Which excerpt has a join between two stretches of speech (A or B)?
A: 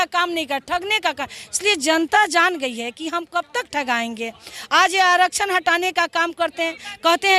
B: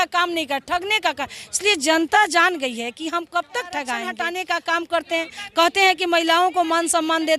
B